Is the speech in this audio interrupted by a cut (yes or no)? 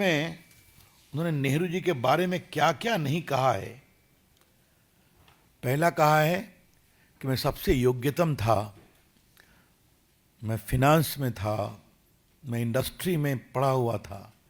no